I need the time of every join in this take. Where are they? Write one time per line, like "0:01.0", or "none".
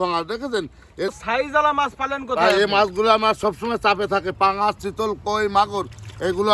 0:01.1